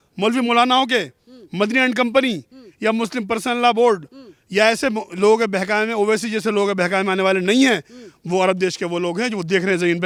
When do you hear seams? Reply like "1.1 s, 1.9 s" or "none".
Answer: none